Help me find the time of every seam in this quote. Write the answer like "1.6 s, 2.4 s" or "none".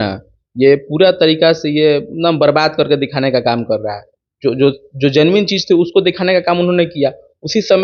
none